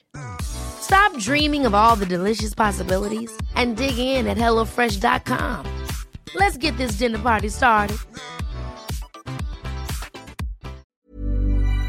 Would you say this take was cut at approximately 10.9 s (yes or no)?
yes